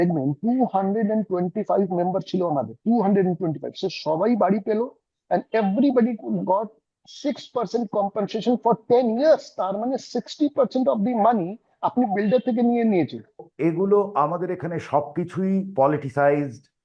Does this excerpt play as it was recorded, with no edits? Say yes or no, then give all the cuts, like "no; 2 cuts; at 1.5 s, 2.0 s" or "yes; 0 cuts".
no; 1 cut; at 13.4 s